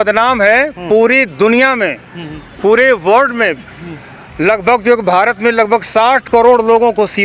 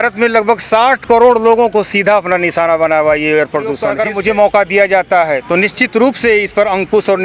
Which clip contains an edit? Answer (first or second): second